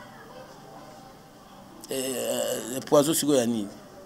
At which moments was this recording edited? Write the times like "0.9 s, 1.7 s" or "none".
none